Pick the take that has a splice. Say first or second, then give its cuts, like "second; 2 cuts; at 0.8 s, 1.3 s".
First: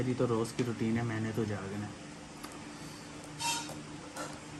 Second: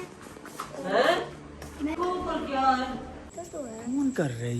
second; 2 cuts; at 1.9 s, 3.2 s